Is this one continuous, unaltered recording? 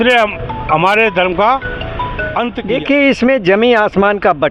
no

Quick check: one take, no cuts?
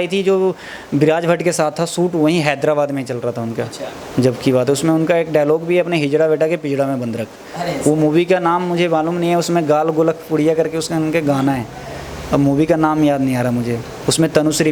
yes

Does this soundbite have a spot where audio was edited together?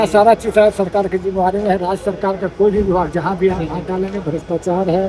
no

